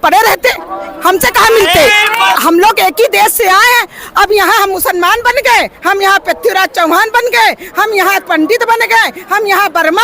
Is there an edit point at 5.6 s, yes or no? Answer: no